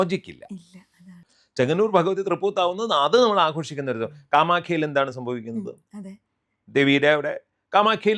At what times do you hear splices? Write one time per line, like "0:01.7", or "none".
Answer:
0:01.1